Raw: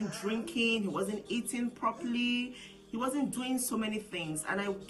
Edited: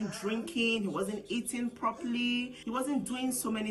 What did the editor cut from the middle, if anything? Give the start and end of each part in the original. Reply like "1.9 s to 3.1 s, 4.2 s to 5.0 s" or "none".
2.6 s to 2.8 s